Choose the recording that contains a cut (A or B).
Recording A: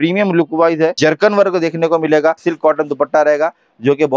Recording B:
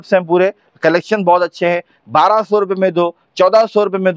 A